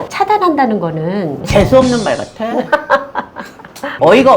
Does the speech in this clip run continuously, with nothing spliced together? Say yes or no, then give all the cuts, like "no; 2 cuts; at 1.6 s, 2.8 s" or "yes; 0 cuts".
no; 1 cut; at 1.4 s